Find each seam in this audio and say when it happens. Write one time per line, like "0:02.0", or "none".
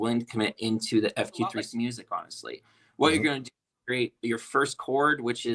0:01.6